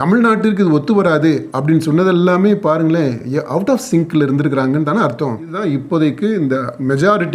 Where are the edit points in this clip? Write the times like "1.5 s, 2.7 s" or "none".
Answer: 5.6 s